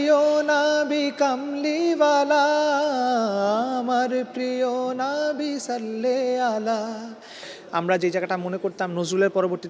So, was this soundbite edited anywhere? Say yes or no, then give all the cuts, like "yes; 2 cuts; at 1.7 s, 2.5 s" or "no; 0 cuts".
yes; 1 cut; at 7.4 s